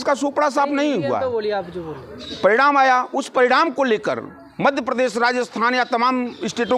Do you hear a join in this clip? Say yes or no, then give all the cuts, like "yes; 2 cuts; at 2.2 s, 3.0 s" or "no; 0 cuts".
no; 0 cuts